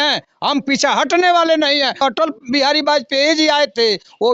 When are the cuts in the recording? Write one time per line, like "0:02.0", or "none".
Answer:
0:02.0